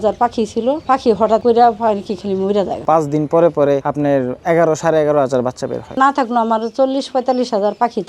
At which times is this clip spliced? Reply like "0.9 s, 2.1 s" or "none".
2.8 s, 6.0 s